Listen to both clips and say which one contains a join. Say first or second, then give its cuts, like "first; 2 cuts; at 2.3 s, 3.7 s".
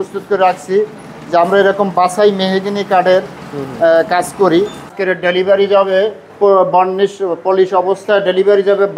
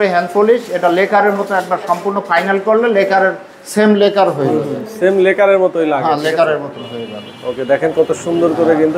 first; 2 cuts; at 4.9 s, 6.3 s